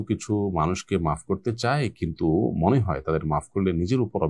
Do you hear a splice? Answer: no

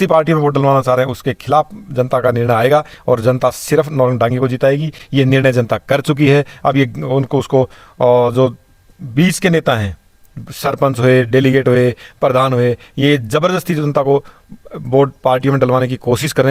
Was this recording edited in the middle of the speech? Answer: no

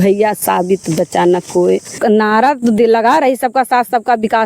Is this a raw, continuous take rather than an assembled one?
no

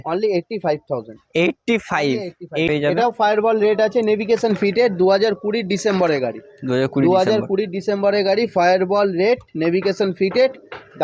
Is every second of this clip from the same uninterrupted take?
no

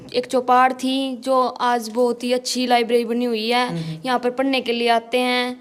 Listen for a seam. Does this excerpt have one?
no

